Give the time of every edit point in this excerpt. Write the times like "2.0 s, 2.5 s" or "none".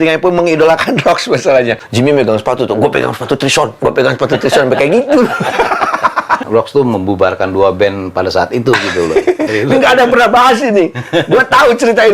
1.8 s, 6.4 s, 9.5 s